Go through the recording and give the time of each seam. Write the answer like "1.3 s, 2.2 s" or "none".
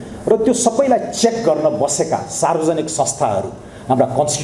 none